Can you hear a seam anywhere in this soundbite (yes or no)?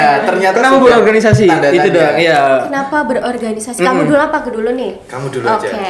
no